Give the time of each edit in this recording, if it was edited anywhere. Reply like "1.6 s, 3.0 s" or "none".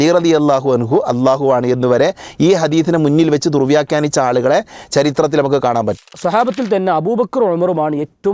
6.1 s